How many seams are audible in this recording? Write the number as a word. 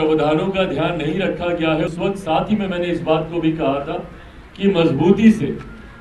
one